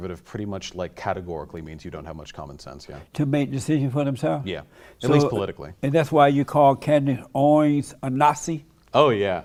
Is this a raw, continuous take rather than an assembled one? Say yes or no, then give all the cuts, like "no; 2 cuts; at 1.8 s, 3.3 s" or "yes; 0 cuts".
yes; 0 cuts